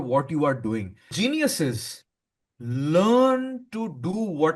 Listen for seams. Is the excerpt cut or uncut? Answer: cut